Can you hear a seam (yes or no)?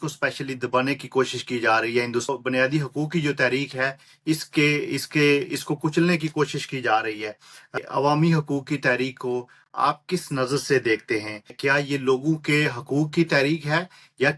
yes